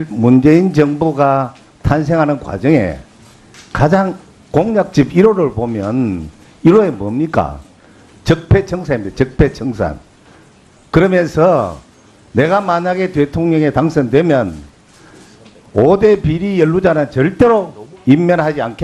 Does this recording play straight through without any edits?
no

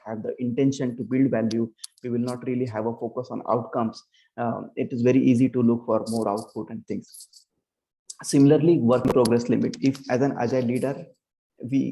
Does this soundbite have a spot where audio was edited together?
no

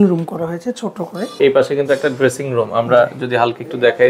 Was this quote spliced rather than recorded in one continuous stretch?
yes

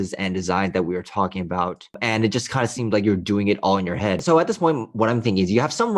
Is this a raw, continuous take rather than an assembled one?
no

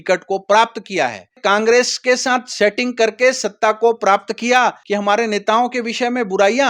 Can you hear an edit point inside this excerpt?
yes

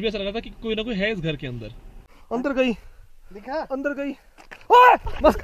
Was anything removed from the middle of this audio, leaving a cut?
yes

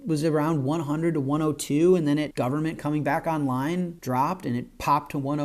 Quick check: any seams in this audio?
yes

